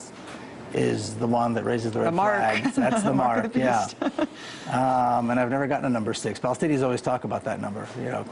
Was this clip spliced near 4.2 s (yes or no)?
no